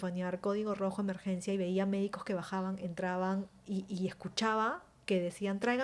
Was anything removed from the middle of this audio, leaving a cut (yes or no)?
no